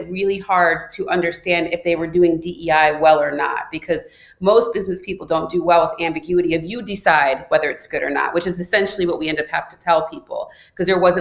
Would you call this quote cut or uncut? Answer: uncut